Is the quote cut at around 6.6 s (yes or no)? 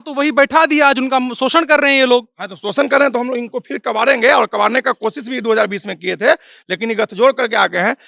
no